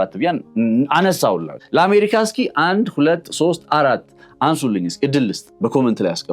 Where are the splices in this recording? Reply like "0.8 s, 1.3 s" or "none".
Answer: 1.5 s, 5.4 s